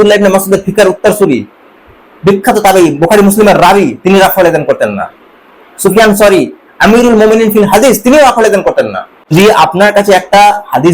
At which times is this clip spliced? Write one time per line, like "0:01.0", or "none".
0:09.3

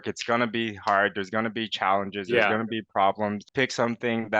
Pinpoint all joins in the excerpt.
0:03.4

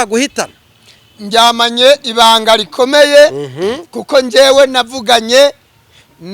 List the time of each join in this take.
none

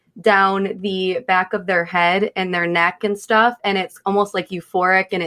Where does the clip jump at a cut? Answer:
none

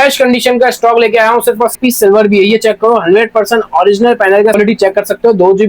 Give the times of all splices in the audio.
0:01.7
0:04.6

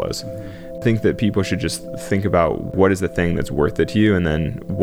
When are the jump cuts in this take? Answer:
0:00.8
0:02.7

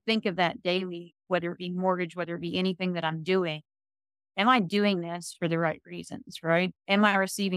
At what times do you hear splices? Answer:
none

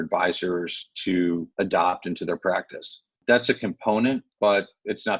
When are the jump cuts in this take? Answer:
0:01.5
0:03.2
0:04.3

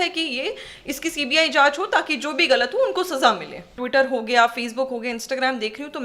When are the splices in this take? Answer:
0:03.8

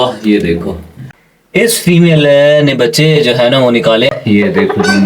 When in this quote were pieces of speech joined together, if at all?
0:01.0
0:04.1

